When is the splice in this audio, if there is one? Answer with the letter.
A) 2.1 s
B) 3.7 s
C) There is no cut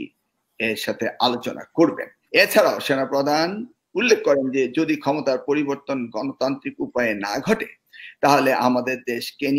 A